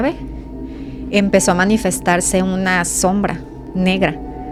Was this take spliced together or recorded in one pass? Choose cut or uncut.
uncut